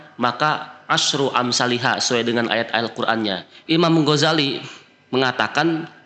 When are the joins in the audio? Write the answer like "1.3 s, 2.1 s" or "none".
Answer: 3.5 s